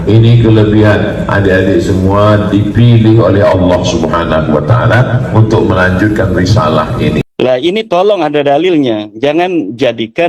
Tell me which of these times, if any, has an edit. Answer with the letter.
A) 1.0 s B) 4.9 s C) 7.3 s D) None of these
C